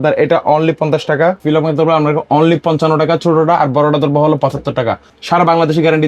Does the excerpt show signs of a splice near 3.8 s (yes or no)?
no